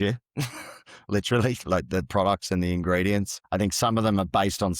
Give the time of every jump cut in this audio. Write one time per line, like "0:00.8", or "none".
0:03.4